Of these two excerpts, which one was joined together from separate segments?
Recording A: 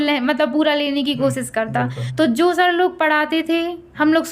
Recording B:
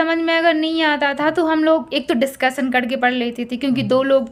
A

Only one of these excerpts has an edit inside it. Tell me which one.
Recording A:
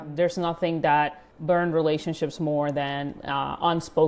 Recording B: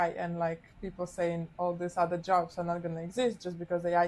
A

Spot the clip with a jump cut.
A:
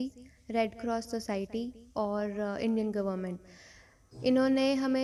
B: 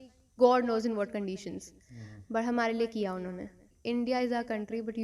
B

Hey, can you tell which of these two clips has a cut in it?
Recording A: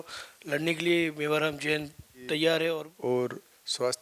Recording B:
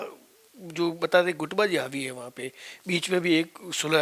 A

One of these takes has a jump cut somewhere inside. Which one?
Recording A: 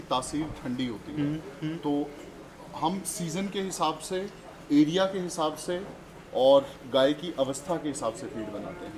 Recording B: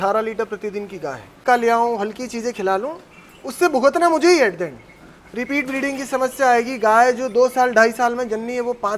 B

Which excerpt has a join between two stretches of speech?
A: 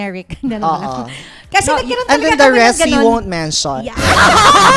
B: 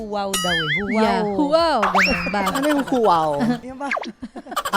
B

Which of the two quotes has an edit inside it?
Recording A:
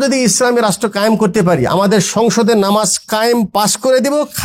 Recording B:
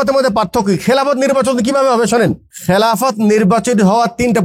B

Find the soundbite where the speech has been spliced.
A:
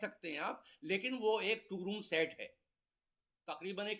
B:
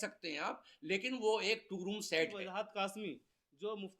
B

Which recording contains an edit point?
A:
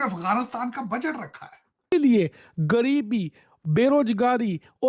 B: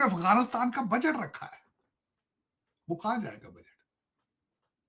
A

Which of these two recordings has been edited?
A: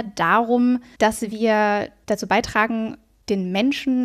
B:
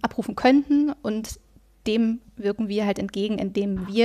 A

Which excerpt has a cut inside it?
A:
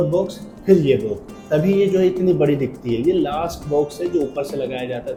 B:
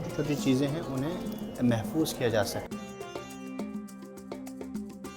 B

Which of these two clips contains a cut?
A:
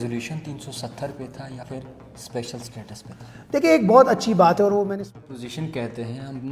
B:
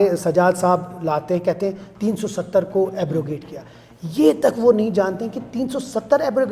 A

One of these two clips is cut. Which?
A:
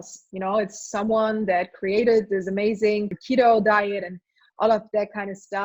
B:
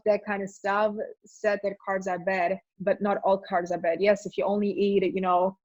A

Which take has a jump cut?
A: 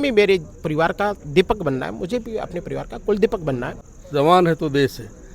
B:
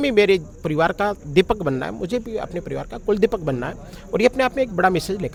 A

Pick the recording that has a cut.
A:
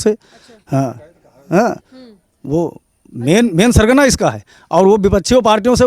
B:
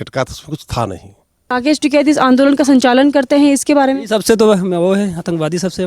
B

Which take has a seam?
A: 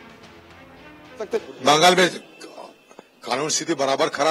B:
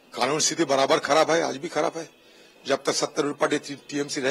A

